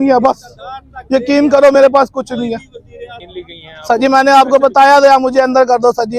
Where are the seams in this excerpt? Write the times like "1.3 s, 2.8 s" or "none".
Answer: 3.1 s